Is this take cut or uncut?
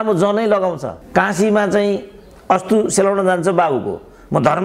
cut